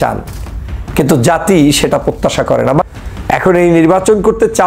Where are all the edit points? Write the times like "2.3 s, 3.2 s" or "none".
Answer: 2.8 s